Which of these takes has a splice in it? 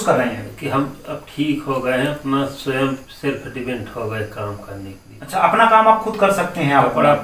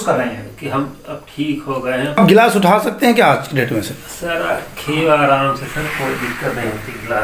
second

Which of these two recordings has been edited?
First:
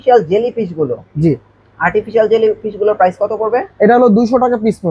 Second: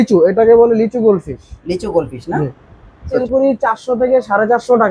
second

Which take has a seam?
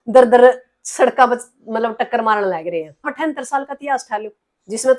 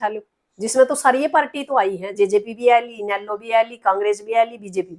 first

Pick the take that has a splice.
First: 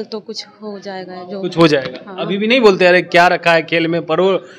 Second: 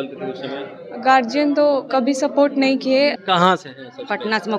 second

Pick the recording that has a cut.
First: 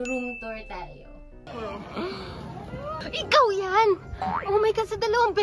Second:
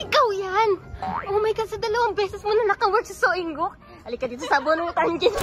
first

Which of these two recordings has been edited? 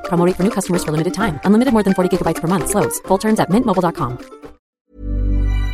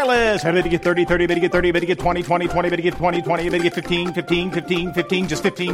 first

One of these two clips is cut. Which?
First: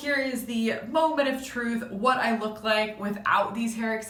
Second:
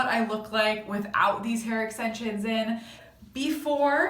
second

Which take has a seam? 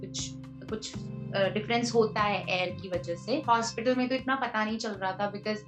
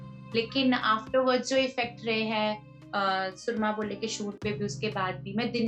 first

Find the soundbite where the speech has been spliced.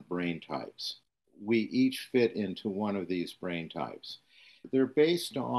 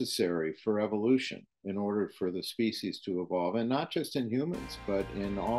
first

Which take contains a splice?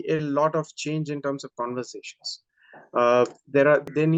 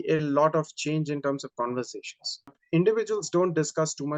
second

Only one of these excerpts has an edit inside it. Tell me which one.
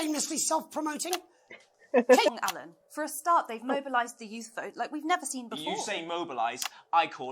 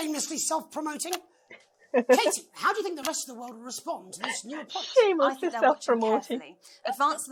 first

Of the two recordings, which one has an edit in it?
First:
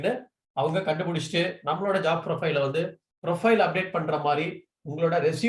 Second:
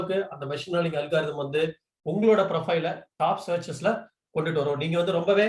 first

